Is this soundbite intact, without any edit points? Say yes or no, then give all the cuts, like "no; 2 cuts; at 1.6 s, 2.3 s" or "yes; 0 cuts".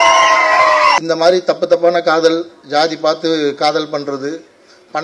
no; 1 cut; at 1.0 s